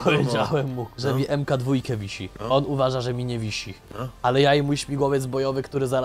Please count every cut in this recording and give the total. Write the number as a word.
zero